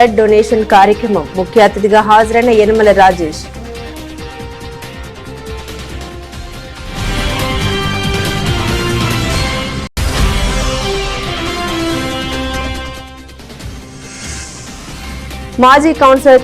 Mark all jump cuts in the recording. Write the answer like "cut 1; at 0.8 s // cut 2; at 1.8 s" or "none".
cut 1; at 12.6 s // cut 2; at 14.0 s